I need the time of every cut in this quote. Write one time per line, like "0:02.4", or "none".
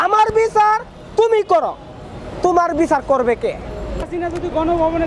0:04.0

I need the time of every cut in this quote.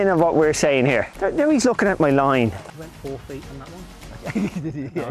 0:01.2
0:02.7

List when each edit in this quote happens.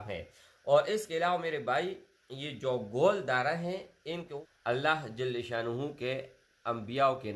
0:04.4

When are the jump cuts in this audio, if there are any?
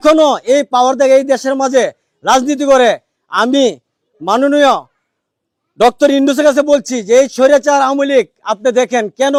none

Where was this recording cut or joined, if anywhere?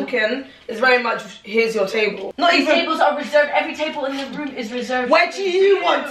0:02.3

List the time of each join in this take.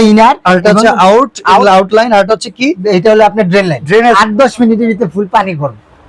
0:04.2

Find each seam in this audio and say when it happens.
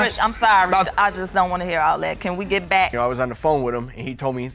0:02.9

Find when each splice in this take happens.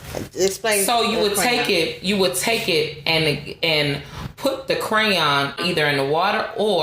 0:05.6

